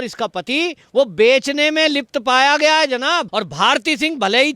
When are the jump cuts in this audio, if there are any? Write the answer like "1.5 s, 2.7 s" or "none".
3.3 s